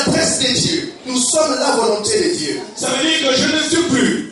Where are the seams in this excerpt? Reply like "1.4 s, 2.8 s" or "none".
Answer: 2.7 s